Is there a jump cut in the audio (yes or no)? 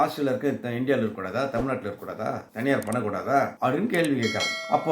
no